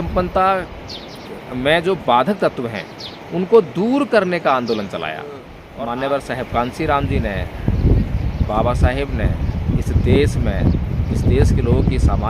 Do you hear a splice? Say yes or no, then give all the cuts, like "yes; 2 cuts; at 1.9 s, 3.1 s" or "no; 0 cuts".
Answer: yes; 1 cut; at 5.6 s